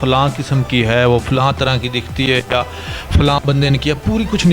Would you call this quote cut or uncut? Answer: uncut